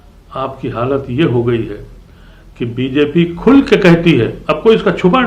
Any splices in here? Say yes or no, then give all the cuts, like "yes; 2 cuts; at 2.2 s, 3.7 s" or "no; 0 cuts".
no; 0 cuts